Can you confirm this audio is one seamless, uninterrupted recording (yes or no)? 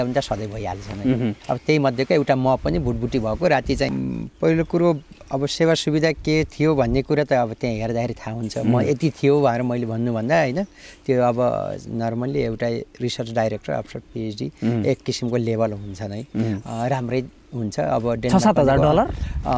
no